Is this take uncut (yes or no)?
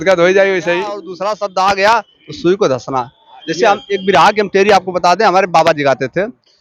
no